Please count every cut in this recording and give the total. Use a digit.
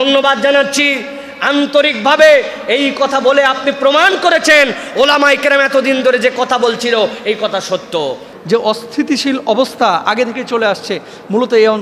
1